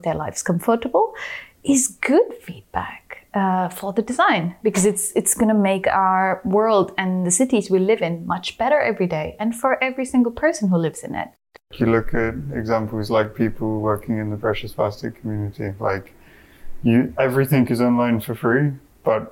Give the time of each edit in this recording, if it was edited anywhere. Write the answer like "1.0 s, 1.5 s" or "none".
11.7 s